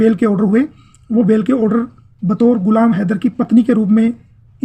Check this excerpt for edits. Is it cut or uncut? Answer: uncut